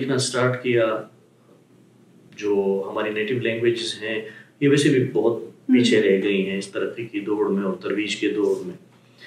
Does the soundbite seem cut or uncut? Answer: uncut